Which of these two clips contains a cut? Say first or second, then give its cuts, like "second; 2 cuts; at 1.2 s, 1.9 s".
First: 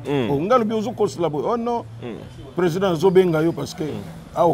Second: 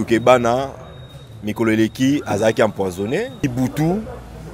second; 1 cut; at 3.4 s